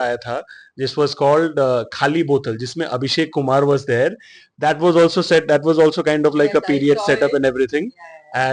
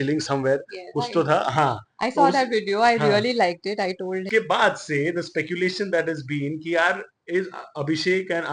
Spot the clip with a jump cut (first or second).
second